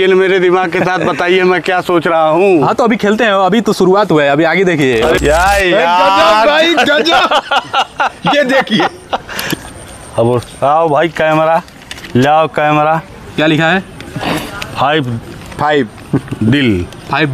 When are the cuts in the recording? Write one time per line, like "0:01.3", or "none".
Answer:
0:05.2
0:09.5

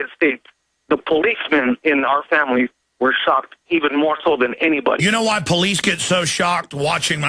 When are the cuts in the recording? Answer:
0:04.0

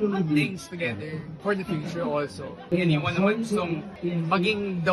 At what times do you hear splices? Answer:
0:01.2
0:02.7
0:03.9

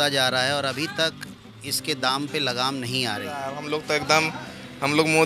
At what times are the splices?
0:03.5

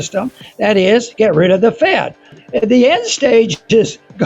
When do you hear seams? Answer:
0:02.4

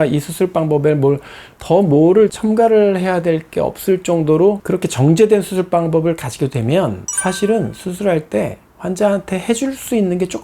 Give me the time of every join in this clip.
0:04.6

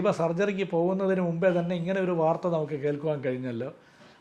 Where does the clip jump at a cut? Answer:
none

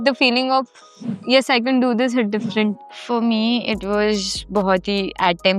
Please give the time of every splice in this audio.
0:02.9

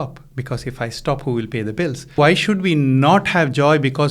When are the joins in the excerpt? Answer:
0:02.2

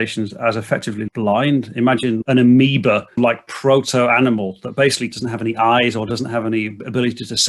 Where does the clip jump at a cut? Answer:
0:02.2
0:03.2
0:05.1

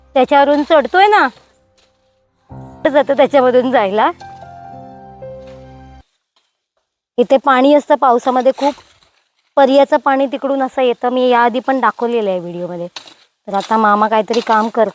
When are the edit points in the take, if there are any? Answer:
0:02.8
0:06.0

